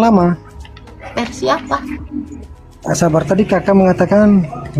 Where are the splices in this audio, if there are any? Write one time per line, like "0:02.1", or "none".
0:02.4